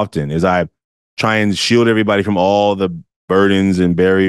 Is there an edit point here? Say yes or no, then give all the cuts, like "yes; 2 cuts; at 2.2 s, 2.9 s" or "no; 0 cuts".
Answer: no; 0 cuts